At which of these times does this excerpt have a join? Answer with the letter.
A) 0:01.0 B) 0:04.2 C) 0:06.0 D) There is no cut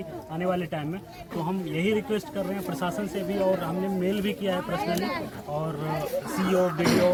D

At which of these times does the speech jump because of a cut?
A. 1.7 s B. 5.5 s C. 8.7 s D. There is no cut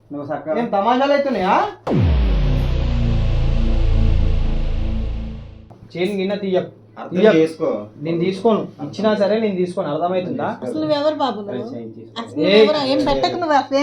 B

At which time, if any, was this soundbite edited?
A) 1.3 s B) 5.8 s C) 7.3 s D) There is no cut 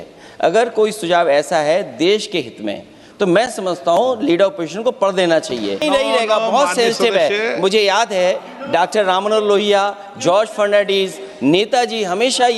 B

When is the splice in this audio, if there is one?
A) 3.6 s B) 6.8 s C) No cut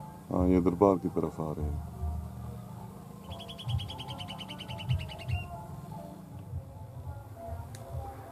B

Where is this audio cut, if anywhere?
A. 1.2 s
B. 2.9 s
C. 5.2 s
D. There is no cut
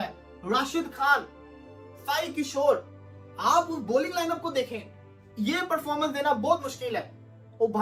D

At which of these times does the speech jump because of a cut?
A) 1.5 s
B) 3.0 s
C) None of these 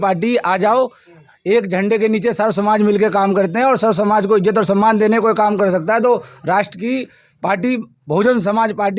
C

